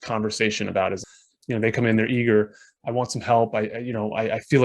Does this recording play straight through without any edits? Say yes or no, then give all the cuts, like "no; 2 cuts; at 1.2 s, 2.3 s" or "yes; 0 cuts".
no; 1 cut; at 1.0 s